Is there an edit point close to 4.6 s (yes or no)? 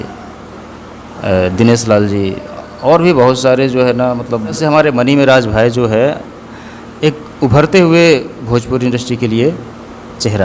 yes